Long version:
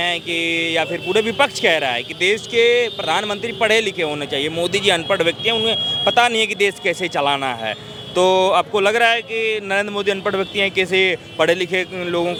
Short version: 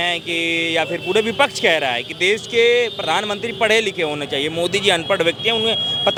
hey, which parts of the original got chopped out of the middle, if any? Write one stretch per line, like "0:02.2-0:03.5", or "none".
none